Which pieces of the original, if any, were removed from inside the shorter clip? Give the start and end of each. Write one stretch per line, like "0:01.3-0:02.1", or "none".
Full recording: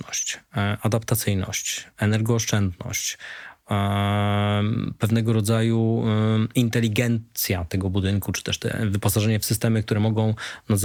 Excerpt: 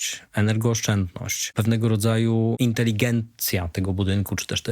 0:03.1-0:04.9
0:06.0-0:06.5